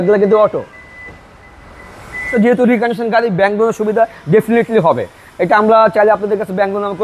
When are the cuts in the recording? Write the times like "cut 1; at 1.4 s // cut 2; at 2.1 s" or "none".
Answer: cut 1; at 2.3 s

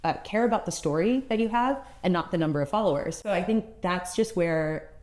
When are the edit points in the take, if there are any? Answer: cut 1; at 3.2 s

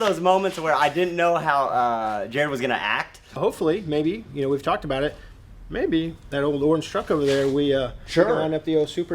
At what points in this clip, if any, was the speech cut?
cut 1; at 3.4 s

